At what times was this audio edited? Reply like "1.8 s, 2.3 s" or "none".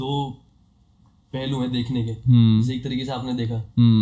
none

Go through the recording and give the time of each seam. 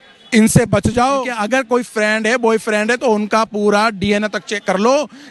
1.4 s

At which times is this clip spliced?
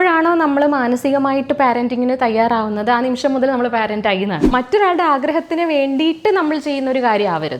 4.5 s

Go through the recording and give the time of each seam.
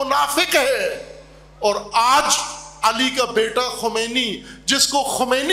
none

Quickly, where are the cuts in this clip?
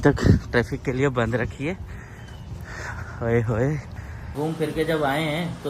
4.2 s

